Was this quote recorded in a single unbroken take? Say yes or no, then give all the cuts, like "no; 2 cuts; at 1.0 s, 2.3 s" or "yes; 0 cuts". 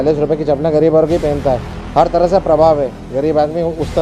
no; 1 cut; at 1.8 s